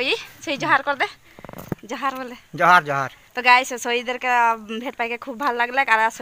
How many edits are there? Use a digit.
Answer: 1